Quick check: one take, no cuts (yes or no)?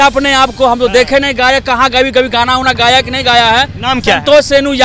yes